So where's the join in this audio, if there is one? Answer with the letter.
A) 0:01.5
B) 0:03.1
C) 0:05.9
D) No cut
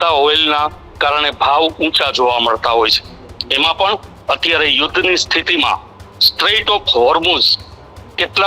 D